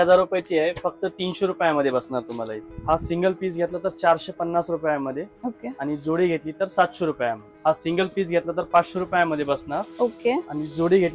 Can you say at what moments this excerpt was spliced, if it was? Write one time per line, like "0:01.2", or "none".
0:02.5
0:07.5